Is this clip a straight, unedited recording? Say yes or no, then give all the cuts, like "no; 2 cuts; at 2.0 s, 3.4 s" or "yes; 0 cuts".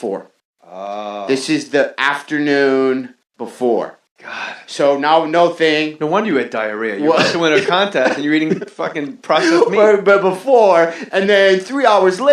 no; 1 cut; at 8.2 s